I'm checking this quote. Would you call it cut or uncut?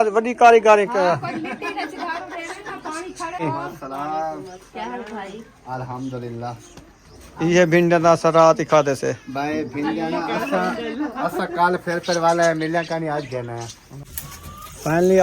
cut